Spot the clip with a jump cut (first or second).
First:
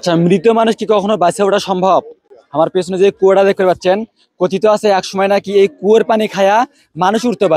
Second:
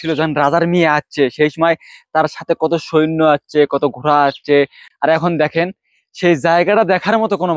second